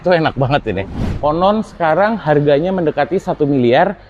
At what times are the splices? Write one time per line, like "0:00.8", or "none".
0:01.0